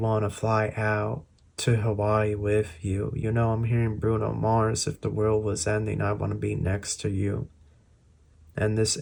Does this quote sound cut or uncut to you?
uncut